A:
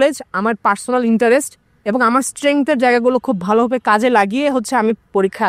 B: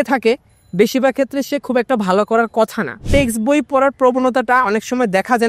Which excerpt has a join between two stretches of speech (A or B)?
B